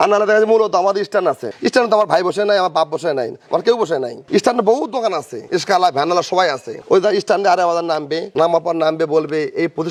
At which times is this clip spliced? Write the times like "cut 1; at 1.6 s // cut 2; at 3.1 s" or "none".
none

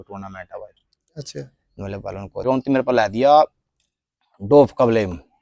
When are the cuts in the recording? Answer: cut 1; at 2.5 s

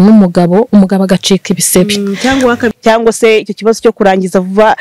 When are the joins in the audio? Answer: cut 1; at 2.8 s

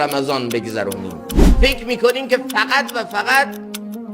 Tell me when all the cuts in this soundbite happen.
cut 1; at 1.5 s

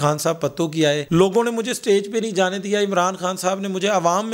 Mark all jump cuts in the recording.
none

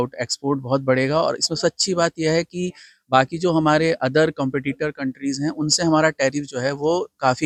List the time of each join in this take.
none

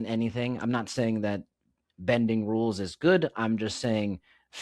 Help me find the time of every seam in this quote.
none

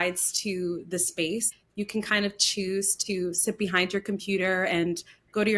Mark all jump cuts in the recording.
cut 1; at 1.5 s

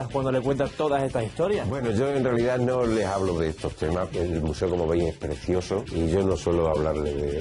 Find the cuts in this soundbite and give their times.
cut 1; at 4.1 s // cut 2; at 5.9 s

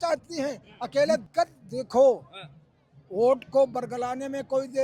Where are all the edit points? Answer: cut 1; at 1.2 s

